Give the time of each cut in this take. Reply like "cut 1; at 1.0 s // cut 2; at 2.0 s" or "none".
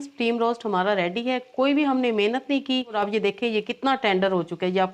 cut 1; at 3.0 s